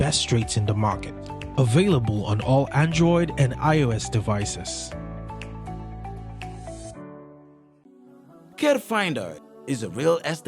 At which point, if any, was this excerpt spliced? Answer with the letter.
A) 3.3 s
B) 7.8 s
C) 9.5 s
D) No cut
B